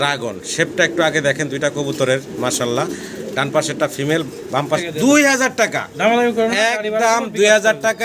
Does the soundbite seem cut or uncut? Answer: cut